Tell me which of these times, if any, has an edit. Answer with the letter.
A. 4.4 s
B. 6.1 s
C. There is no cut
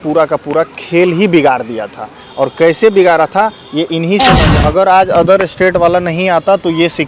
A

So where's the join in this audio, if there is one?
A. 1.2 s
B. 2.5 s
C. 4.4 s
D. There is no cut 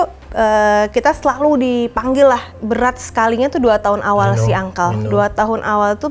B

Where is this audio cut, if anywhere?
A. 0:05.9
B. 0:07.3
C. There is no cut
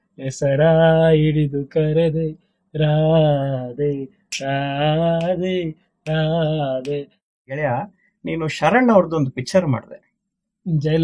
B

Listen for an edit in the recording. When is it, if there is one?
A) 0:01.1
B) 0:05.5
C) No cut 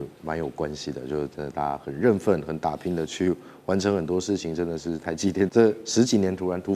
B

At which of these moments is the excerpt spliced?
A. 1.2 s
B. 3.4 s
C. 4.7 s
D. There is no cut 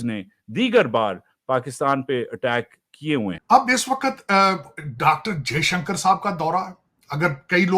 B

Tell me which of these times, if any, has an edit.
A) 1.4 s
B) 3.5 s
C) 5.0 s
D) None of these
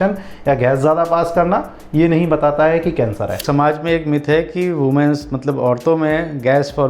B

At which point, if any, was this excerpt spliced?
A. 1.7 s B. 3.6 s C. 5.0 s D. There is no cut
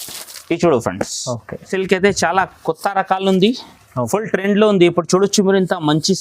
A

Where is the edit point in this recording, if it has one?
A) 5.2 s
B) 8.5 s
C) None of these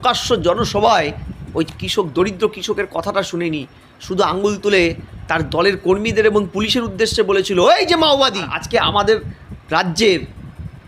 B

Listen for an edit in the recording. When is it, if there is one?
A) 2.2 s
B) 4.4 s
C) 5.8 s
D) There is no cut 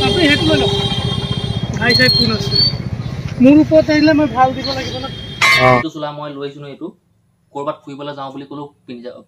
C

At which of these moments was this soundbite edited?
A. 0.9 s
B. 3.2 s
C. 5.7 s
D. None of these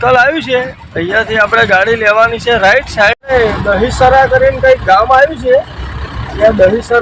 B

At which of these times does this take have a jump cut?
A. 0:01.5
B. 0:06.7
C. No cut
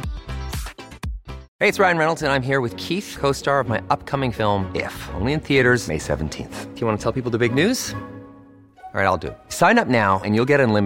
A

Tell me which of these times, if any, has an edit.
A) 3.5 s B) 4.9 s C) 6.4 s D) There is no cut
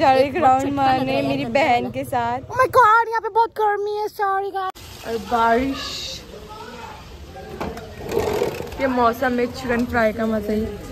B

